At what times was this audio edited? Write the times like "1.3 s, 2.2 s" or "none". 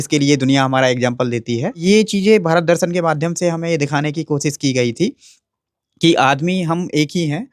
1.8 s